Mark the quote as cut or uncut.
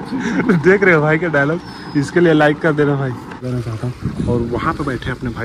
cut